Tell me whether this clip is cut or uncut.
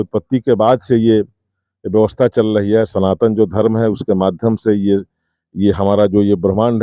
uncut